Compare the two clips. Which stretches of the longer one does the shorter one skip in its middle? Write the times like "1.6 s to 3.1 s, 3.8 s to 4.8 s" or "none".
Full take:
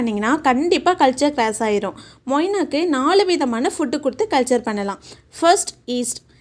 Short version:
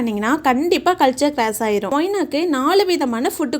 1.9 s to 2.3 s